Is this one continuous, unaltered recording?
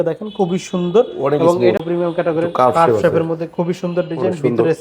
no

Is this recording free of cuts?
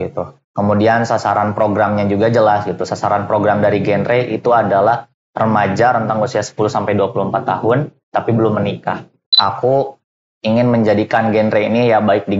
no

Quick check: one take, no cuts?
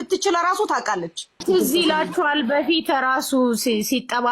no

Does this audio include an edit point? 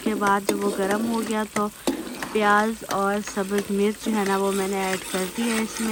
no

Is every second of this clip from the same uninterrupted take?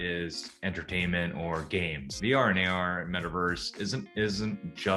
no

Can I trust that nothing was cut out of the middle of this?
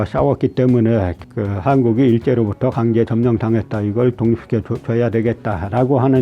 no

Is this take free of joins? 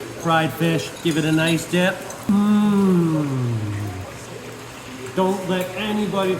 no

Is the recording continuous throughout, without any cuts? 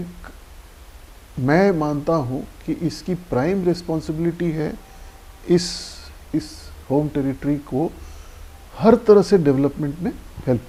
yes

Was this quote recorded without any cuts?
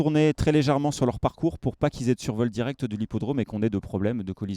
yes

